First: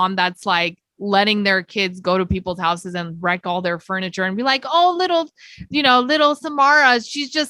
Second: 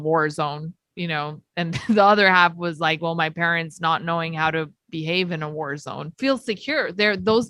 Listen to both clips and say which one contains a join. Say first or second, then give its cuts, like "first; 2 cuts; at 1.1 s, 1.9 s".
second; 1 cut; at 6.1 s